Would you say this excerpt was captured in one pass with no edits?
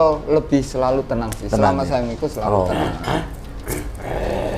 yes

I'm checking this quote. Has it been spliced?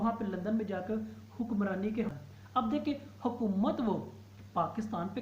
yes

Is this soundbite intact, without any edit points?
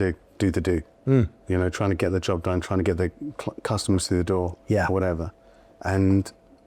yes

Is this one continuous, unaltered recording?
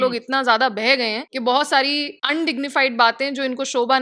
no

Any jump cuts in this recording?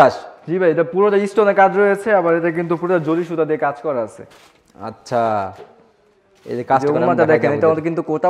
no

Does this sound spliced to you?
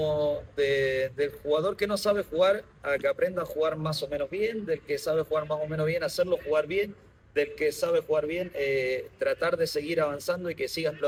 no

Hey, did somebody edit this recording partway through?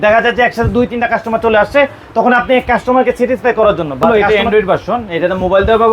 yes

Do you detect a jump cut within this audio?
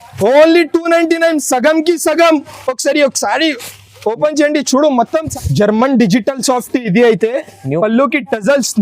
yes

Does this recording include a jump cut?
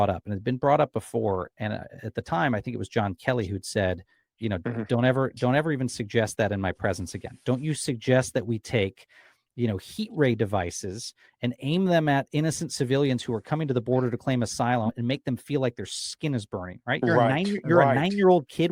no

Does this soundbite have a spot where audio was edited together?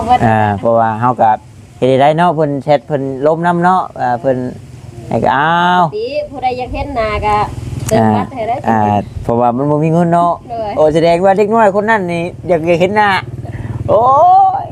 no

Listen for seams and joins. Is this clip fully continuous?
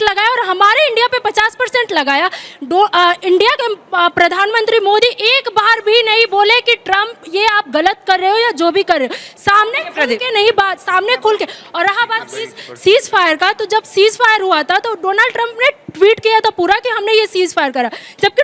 yes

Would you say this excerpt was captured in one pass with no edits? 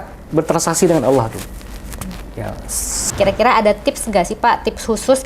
no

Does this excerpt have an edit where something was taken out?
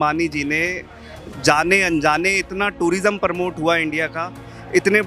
no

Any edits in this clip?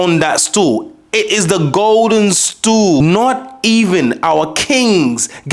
no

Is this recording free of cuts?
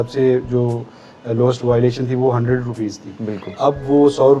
yes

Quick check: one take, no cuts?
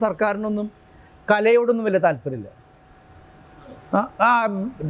yes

